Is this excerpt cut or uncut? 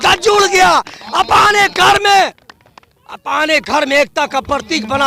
uncut